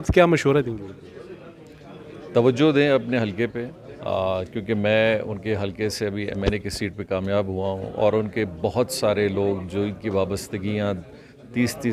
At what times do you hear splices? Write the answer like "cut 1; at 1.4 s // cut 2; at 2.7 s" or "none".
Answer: none